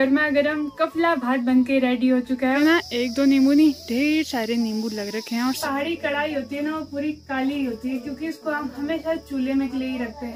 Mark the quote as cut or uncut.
cut